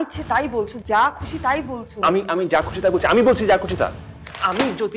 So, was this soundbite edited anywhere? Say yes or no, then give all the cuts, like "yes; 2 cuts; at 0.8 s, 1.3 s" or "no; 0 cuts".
yes; 1 cut; at 4.0 s